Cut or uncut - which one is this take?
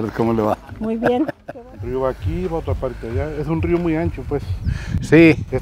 cut